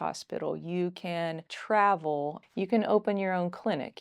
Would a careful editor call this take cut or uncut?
cut